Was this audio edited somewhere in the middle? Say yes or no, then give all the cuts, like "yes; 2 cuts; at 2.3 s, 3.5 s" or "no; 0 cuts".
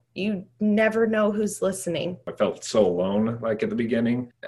yes; 1 cut; at 2.2 s